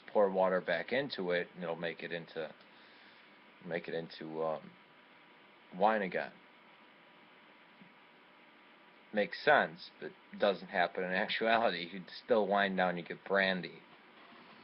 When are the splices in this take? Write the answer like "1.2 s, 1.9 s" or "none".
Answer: 8.0 s

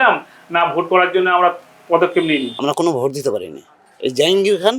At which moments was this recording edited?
2.5 s

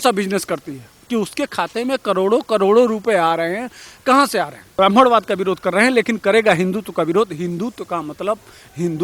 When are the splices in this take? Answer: 4.8 s

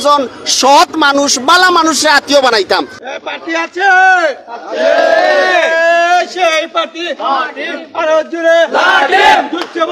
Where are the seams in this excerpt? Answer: 3.0 s

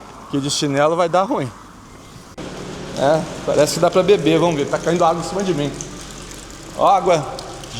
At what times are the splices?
2.4 s

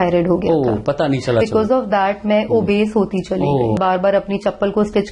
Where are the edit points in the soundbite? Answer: 1.4 s, 3.8 s

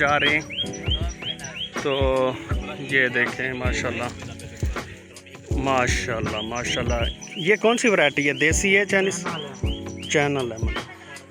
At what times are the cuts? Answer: 4.1 s, 5.6 s

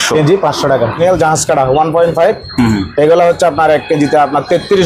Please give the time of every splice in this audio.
1.0 s

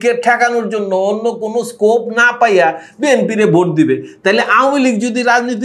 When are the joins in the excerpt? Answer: none

